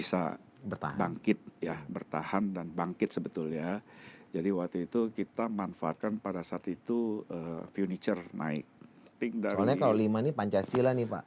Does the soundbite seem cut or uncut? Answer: cut